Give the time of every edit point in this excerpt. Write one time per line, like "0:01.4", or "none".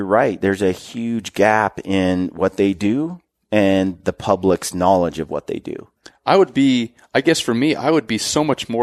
none